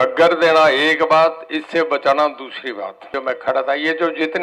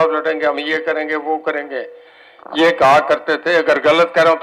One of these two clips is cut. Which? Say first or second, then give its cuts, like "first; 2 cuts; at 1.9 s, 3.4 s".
first; 1 cut; at 3.1 s